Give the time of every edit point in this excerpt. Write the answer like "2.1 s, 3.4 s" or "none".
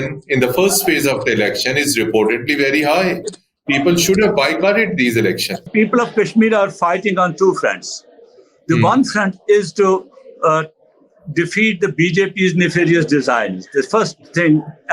5.7 s